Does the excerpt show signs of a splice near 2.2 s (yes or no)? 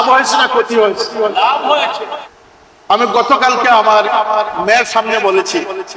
yes